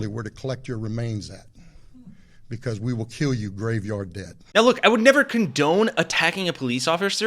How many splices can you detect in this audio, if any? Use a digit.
0